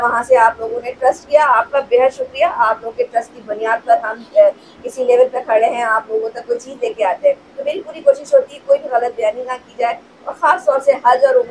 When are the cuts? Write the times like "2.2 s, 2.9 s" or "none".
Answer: none